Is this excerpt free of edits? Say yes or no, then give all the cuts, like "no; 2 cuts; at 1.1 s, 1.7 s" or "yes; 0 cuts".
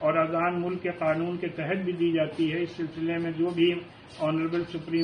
yes; 0 cuts